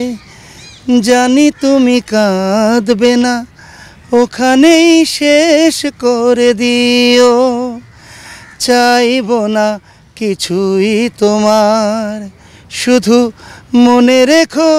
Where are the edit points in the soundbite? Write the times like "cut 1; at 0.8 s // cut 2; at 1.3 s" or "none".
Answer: none